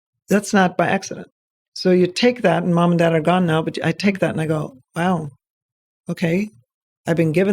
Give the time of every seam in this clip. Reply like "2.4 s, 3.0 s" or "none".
1.4 s